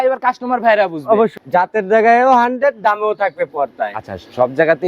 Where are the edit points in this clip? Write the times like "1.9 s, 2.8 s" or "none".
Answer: 1.3 s